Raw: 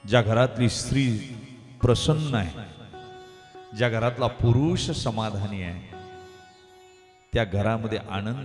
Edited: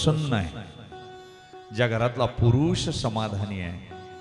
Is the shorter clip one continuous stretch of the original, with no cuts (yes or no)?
yes